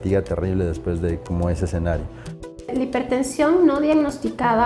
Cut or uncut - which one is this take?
cut